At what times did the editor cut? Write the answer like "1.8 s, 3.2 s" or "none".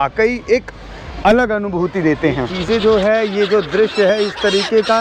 2.5 s